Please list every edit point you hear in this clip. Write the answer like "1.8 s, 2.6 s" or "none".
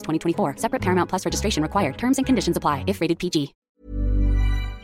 3.6 s